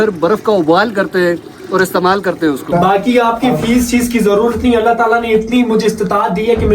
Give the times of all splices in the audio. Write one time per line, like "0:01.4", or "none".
0:02.7